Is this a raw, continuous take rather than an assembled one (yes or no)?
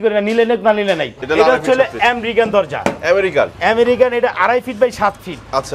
no